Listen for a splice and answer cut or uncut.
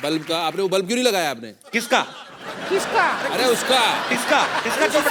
uncut